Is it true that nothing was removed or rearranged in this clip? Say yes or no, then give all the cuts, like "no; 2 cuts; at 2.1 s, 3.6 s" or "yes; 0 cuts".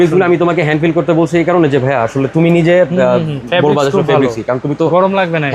yes; 0 cuts